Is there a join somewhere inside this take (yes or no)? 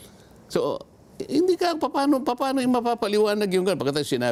no